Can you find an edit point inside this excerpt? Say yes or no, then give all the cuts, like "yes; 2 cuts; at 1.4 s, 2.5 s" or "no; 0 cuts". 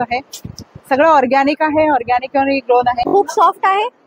yes; 1 cut; at 3.1 s